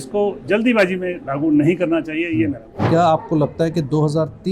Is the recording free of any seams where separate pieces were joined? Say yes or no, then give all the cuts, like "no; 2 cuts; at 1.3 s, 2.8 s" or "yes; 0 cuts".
no; 1 cut; at 2.8 s